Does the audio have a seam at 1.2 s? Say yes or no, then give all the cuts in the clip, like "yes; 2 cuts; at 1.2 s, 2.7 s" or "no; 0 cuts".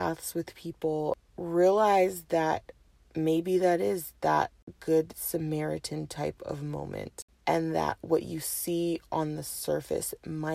yes; 3 cuts; at 1.2 s, 4.7 s, 7.2 s